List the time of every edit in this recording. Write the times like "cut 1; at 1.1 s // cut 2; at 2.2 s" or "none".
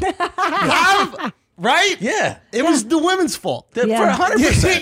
none